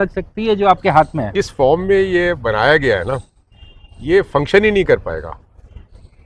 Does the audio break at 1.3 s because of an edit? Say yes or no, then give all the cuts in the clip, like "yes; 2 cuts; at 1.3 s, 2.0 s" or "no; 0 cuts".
yes; 1 cut; at 1.3 s